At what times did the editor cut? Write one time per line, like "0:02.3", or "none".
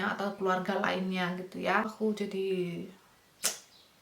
0:01.9